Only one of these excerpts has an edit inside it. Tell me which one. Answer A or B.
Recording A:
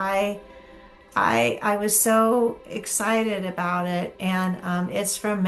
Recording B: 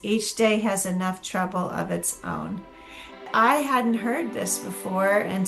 B